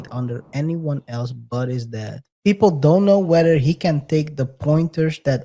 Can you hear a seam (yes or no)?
yes